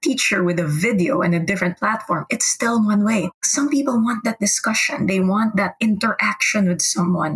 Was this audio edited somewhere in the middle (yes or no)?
no